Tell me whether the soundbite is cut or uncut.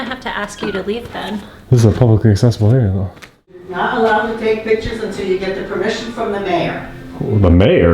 cut